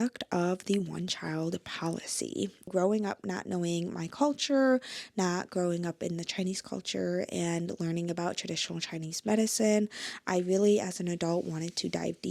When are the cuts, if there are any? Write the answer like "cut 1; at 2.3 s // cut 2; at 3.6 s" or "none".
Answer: cut 1; at 2.7 s

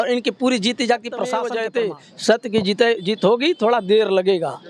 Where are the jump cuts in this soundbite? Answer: cut 1; at 1.4 s

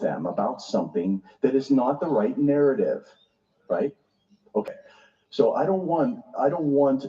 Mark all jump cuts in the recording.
cut 1; at 4.7 s

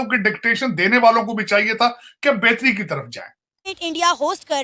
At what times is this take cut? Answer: cut 1; at 3.7 s

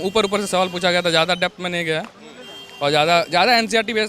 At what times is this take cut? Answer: none

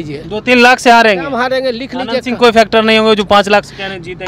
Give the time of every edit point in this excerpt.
none

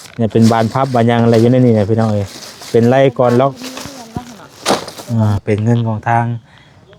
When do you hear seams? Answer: cut 1; at 5.4 s

